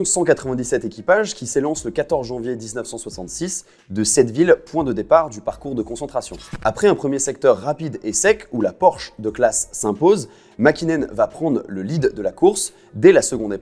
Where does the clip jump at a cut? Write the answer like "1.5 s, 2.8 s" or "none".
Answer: 6.4 s